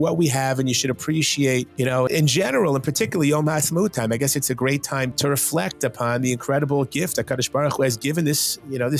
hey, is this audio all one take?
no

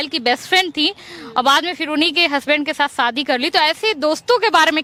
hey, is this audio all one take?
yes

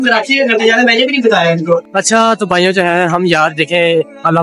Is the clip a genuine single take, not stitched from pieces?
no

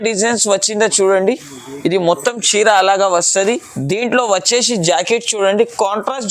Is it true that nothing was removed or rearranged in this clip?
yes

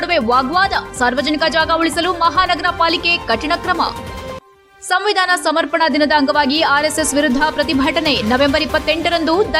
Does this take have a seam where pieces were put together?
no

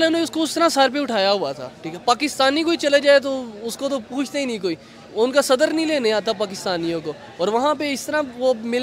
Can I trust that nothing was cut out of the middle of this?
yes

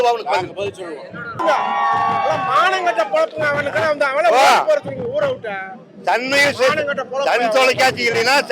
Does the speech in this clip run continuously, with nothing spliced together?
no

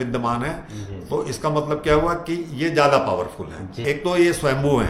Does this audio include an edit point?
yes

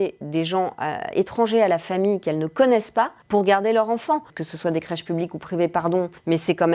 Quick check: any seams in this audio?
yes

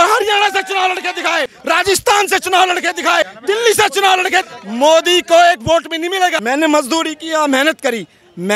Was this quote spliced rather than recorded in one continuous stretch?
yes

